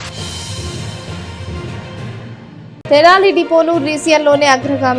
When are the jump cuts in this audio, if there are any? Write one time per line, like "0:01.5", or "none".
0:02.4